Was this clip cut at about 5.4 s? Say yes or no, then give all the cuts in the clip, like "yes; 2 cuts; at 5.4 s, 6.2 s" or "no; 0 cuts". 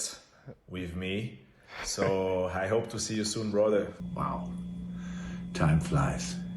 no; 1 cut; at 4.0 s